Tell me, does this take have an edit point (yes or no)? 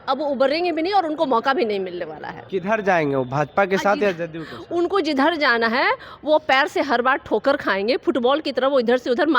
yes